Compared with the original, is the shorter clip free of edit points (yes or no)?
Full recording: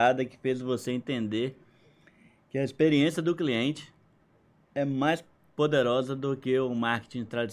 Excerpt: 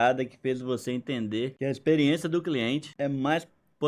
no